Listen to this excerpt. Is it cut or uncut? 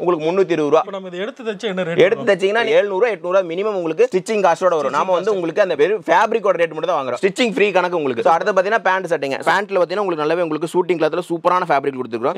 uncut